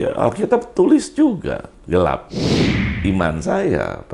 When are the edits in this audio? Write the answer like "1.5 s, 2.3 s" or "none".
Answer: 1.7 s, 2.8 s